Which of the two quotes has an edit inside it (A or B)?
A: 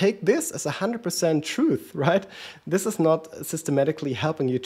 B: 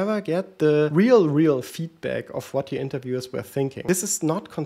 B